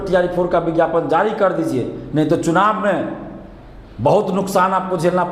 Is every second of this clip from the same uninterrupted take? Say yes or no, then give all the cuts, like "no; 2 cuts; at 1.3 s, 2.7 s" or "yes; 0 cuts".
yes; 0 cuts